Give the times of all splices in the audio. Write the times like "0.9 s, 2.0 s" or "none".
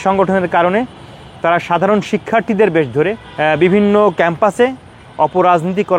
none